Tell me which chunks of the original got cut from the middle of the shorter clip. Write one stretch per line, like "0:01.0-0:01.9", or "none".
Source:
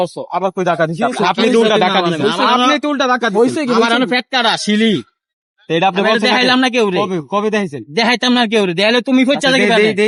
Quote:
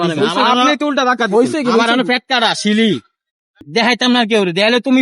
0:05.6-0:07.8